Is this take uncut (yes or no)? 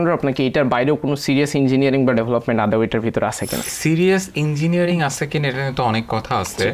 no